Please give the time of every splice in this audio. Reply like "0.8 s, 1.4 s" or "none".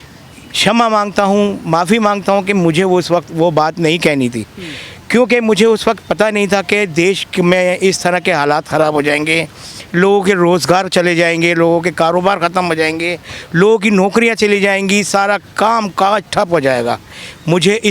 none